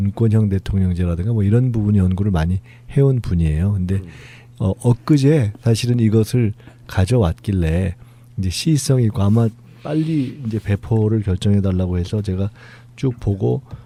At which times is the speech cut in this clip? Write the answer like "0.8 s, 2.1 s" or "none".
none